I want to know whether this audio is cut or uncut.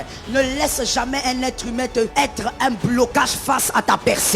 cut